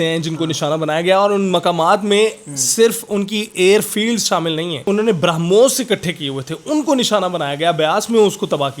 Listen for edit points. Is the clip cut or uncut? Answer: cut